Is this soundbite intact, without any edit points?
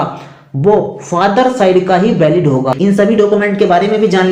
no; 1 cut; at 2.7 s

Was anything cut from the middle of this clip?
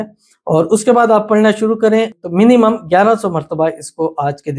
yes; 1 cut; at 2.2 s

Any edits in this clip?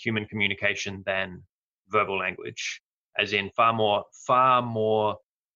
no; 0 cuts

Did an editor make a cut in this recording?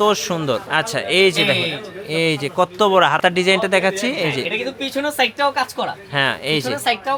no; 0 cuts

